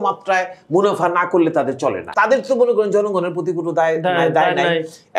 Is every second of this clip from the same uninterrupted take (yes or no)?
no